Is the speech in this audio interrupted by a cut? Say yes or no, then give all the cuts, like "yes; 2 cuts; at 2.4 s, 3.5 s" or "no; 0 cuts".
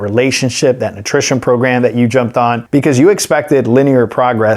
yes; 1 cut; at 2.6 s